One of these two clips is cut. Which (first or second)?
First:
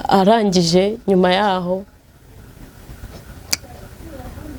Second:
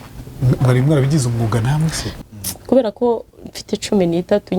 second